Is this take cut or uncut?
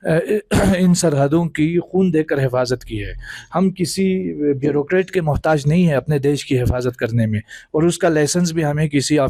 uncut